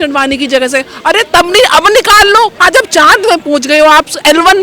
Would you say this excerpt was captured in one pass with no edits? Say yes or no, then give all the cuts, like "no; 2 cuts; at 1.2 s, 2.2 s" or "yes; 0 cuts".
no; 1 cut; at 2.6 s